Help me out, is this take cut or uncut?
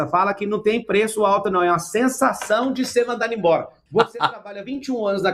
cut